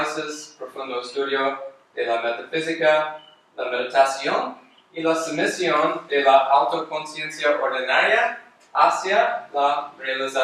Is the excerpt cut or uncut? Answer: cut